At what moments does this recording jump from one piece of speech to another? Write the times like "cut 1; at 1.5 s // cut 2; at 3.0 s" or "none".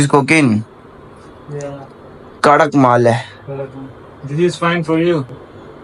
none